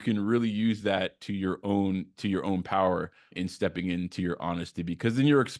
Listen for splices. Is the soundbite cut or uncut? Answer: uncut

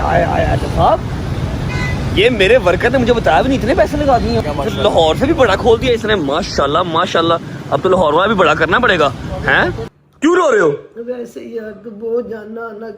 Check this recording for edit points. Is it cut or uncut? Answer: cut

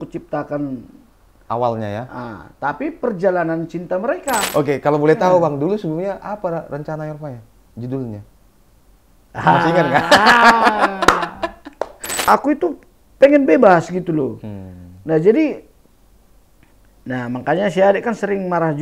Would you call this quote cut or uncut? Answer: cut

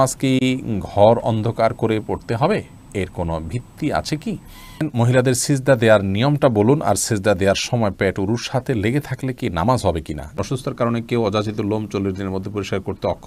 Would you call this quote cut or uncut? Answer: cut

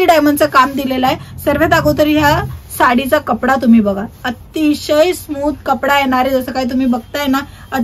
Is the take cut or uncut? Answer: uncut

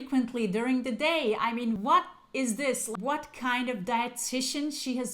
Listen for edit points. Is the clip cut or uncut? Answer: cut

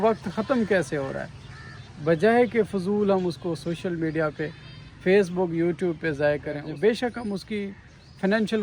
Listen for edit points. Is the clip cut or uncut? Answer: cut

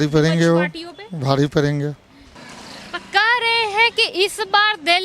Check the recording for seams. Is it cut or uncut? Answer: uncut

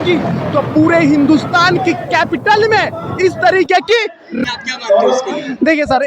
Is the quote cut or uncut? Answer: cut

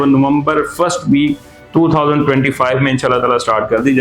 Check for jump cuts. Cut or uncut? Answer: uncut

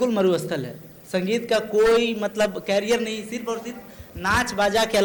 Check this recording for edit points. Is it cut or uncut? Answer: uncut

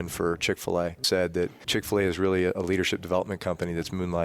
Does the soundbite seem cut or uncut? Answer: cut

